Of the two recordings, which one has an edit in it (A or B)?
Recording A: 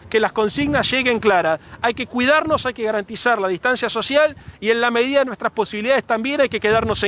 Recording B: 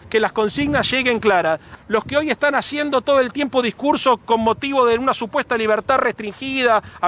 B